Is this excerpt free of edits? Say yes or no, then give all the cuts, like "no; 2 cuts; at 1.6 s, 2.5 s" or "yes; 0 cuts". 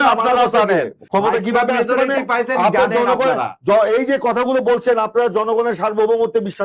no; 1 cut; at 1.0 s